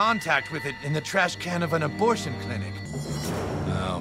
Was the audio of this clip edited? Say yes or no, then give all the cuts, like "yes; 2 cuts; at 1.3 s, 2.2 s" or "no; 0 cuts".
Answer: yes; 1 cut; at 2.8 s